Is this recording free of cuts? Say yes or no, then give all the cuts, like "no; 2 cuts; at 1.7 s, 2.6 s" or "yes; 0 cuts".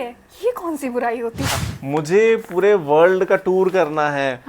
no; 1 cut; at 1.7 s